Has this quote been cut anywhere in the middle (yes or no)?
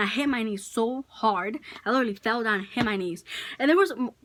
no